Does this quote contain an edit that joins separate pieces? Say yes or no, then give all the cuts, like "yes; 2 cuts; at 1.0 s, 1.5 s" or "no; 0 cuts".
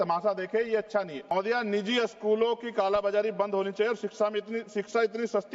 yes; 1 cut; at 1.2 s